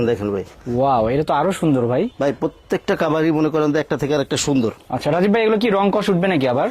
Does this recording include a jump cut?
no; 0 cuts

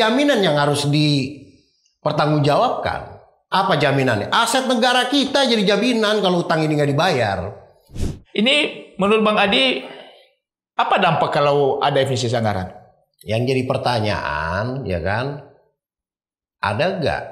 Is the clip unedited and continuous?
no; 1 cut; at 7.9 s

